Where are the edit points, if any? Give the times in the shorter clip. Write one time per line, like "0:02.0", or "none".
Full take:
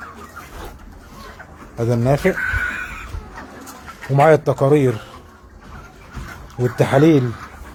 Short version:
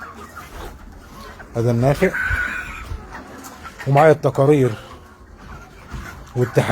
0:01.4